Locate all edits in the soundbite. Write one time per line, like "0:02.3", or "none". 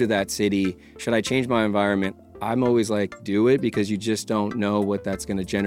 0:02.3